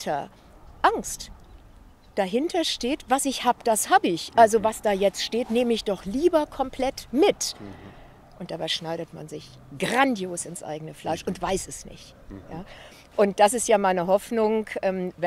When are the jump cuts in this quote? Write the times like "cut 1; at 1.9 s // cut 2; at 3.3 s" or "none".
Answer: none